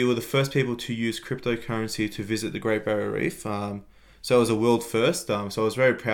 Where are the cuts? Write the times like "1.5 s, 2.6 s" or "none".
none